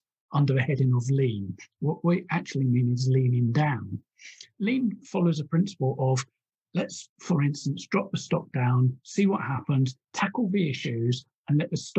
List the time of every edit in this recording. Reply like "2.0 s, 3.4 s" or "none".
4.4 s, 10.0 s